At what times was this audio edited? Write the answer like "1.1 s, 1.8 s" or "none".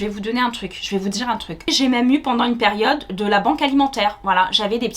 1.7 s